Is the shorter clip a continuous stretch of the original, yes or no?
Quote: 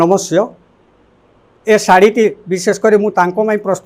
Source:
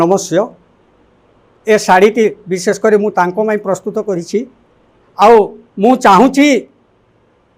yes